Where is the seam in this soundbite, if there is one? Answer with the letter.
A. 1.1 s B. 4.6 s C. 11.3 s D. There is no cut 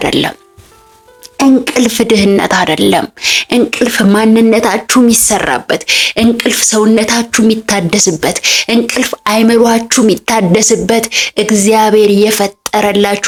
D